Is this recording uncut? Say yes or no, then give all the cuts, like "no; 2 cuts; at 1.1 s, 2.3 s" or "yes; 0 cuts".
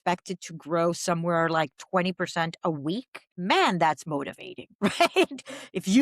no; 1 cut; at 3.2 s